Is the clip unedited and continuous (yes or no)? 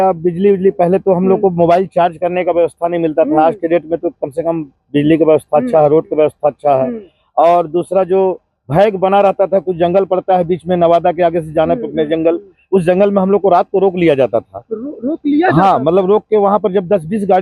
yes